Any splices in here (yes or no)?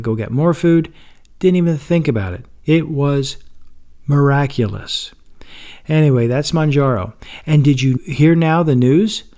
yes